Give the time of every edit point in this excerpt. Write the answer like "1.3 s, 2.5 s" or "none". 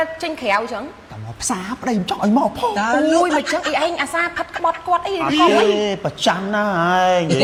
none